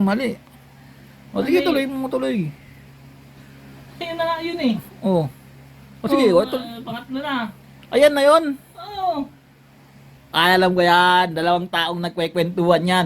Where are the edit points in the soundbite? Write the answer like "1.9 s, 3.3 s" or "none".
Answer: 10.2 s